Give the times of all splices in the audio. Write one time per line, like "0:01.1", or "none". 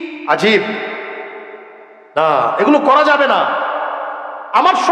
none